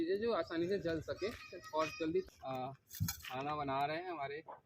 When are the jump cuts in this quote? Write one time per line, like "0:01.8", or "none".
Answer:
0:02.3